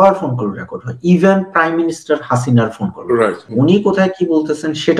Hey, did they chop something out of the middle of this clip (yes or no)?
yes